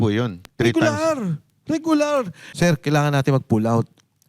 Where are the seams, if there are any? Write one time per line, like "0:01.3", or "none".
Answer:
0:02.4